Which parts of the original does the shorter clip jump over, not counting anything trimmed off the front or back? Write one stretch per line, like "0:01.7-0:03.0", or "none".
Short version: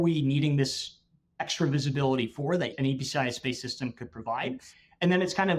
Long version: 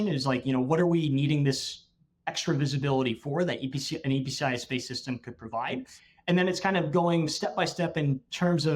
0:03.6-0:04.0